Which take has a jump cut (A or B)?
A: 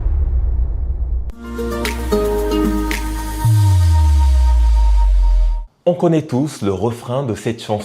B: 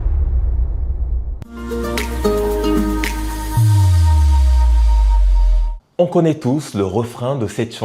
A